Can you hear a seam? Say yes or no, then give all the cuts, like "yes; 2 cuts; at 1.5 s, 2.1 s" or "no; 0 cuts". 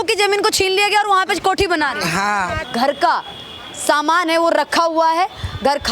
yes; 1 cut; at 2.6 s